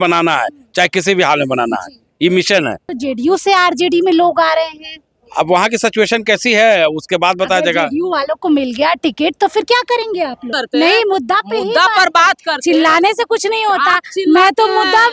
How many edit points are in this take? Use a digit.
2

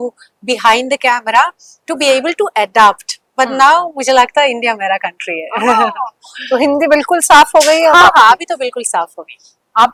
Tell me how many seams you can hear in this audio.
0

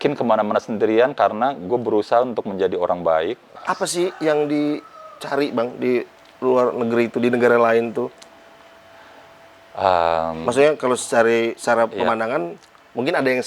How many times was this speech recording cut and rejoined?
1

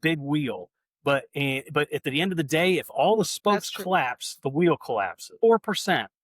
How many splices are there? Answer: 1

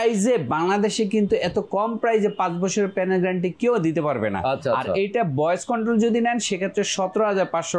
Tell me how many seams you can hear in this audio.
0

